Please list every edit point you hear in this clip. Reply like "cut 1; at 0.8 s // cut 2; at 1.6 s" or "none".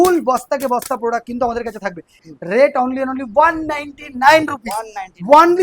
cut 1; at 2.2 s